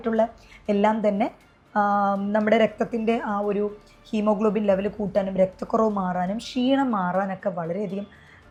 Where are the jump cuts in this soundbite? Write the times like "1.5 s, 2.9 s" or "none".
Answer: none